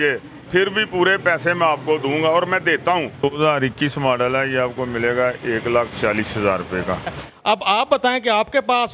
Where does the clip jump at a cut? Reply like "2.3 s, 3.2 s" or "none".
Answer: 3.3 s, 7.3 s